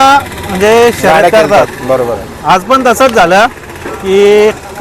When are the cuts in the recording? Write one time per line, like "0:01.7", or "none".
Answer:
none